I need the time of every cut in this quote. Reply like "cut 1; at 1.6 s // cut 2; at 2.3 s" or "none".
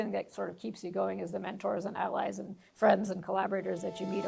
none